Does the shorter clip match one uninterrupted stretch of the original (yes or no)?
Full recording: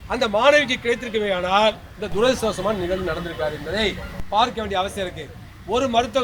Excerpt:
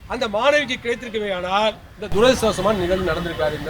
yes